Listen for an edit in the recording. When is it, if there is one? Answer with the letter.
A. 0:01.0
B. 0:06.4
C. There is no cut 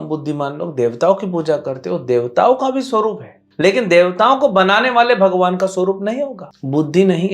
B